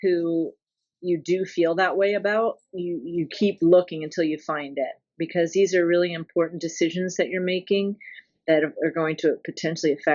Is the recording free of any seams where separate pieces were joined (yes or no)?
yes